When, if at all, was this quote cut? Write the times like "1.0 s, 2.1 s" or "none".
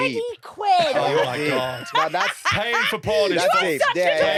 none

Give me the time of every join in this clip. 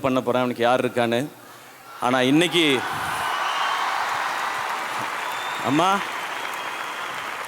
none

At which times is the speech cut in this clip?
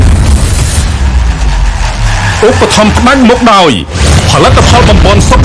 none

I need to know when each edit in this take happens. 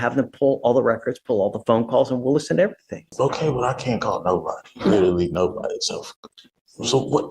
3.0 s

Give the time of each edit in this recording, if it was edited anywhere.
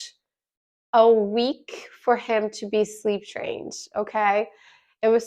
none

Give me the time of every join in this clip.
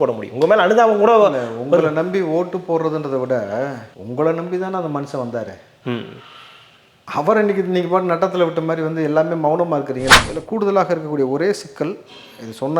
10.2 s

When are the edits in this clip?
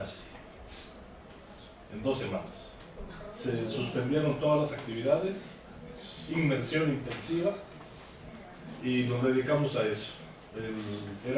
none

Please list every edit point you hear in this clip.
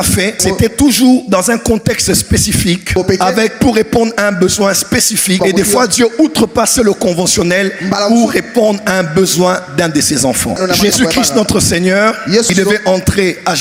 none

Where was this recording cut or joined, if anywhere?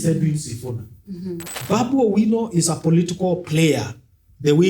1.5 s

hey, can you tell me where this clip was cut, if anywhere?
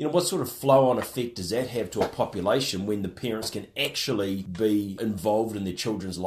4.9 s

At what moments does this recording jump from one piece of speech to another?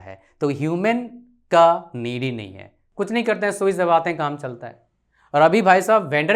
2.8 s

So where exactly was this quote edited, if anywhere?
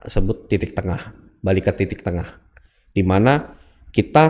none

